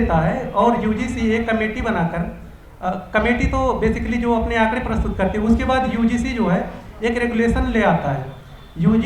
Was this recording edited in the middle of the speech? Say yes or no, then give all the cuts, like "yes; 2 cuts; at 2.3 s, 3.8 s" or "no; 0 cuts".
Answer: no; 0 cuts